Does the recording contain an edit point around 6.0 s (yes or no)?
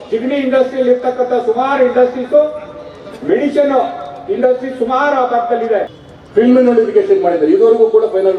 yes